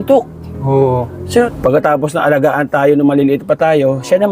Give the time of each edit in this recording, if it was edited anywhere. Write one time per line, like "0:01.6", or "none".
0:01.5